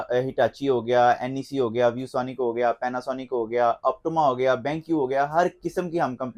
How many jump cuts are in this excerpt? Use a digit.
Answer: 0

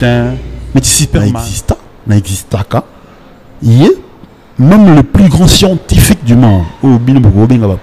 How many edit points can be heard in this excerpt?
1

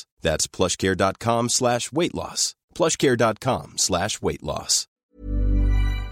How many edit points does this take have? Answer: 1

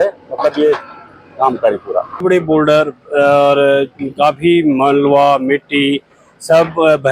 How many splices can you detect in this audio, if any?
1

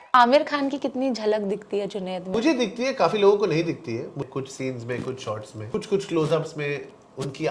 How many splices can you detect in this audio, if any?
3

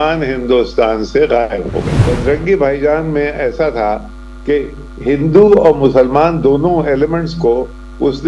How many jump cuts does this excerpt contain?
1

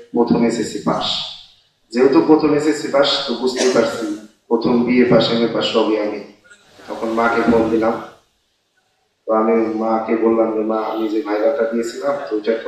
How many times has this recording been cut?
1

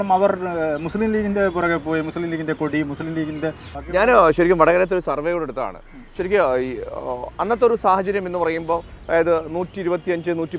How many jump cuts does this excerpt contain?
2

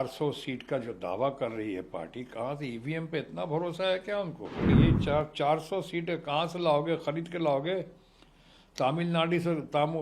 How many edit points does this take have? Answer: 1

